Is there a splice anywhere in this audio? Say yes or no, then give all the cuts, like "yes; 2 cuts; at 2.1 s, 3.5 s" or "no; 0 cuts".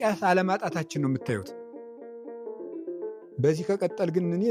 no; 0 cuts